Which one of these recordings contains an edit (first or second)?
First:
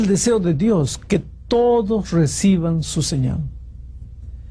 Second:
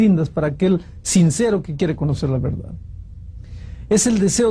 second